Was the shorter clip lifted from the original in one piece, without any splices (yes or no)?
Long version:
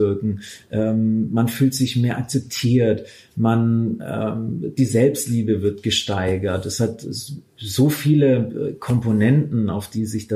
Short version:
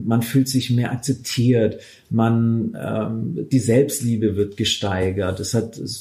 yes